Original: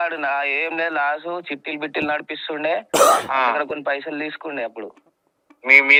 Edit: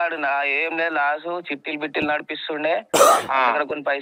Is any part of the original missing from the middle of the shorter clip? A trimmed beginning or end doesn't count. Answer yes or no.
no